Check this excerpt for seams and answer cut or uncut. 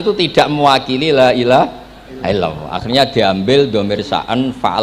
uncut